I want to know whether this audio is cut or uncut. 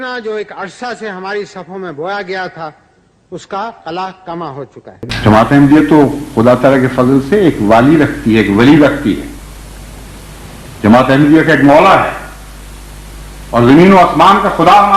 cut